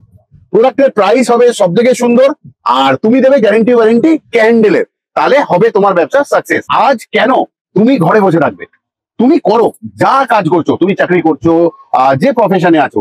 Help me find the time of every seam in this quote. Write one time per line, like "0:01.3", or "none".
0:06.7